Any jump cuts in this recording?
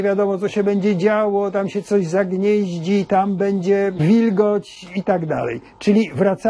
no; 0 cuts

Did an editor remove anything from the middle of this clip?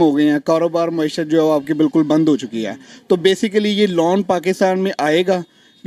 no; 0 cuts

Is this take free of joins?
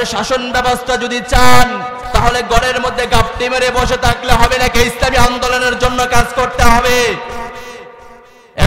yes; 0 cuts

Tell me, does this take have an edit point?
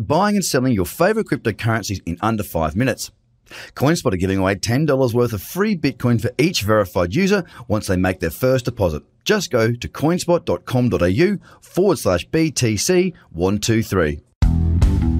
yes; 1 cut; at 14.3 s

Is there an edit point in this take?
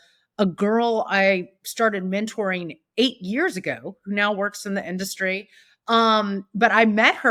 no; 0 cuts

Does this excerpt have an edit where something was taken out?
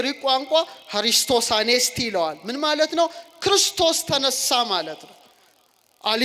no; 0 cuts

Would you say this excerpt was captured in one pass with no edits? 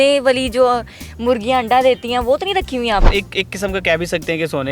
no; 1 cut; at 3.1 s

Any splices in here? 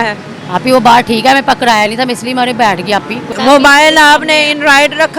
yes; 1 cut; at 3.2 s

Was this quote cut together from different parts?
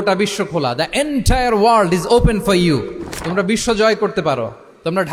no; 0 cuts

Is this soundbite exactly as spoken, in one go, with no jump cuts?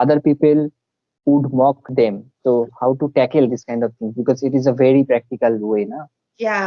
no; 1 cut; at 1.8 s

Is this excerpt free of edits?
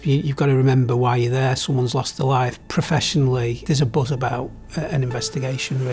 no; 2 cuts; at 2.6 s, 3.6 s

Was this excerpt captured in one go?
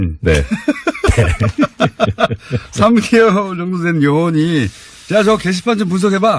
no; 1 cut; at 1.1 s

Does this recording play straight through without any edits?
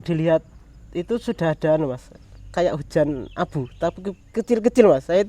yes; 0 cuts

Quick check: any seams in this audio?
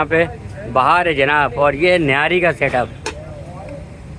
no; 0 cuts

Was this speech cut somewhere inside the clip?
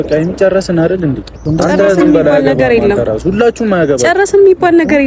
yes; 1 cut; at 1.4 s

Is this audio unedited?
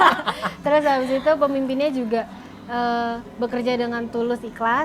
yes; 0 cuts

